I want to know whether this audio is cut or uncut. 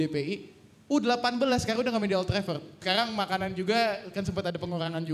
cut